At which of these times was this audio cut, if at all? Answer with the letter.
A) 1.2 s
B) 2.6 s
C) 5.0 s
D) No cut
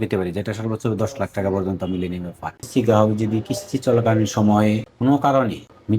B